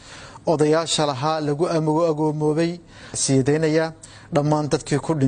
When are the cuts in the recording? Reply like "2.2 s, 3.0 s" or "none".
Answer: 3.2 s